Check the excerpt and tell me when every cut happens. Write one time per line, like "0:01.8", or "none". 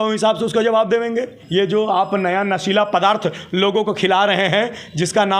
0:01.4